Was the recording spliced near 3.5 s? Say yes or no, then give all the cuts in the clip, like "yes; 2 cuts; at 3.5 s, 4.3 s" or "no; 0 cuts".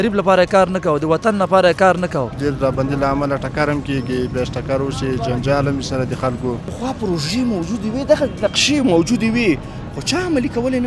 no; 2 cuts; at 2.3 s, 6.7 s